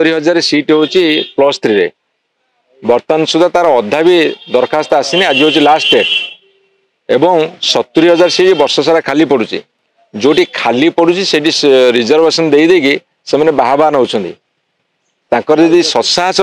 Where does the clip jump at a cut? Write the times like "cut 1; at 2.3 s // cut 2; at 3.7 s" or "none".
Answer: none